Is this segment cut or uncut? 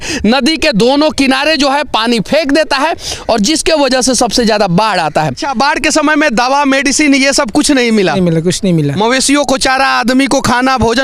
cut